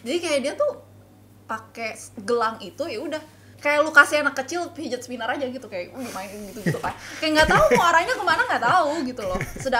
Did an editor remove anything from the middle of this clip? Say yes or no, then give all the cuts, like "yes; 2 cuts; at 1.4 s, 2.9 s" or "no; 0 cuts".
no; 0 cuts